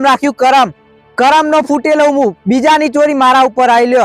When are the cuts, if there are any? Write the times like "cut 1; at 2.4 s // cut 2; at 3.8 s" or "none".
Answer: none